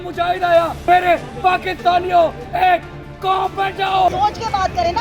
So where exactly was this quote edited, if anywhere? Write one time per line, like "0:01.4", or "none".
0:00.8
0:04.1